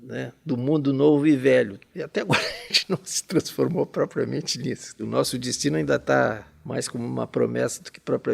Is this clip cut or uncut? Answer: cut